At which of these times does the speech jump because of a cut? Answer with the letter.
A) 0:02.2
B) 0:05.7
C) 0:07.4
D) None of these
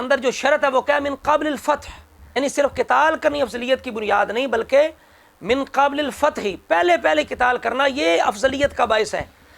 A